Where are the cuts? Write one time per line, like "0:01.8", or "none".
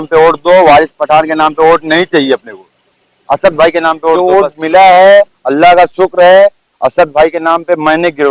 0:04.2